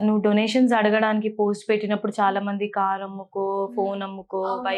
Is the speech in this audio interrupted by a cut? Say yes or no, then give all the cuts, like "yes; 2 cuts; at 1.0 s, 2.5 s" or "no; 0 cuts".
no; 0 cuts